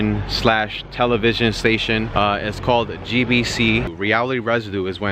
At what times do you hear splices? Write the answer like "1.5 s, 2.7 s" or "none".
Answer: 2.1 s, 3.9 s